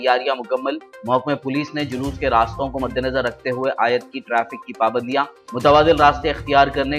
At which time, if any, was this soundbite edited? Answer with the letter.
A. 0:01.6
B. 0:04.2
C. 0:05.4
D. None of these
D